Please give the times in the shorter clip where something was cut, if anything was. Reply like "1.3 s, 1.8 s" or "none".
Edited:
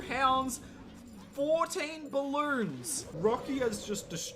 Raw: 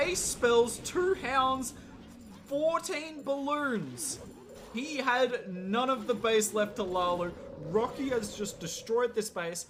3.0 s